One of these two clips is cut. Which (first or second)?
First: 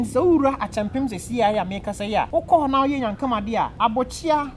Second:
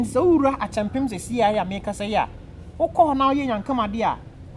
first